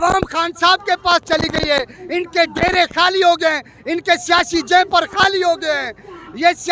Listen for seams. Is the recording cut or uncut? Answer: uncut